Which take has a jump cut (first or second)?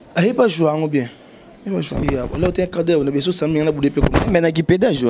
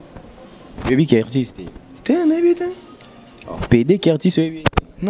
first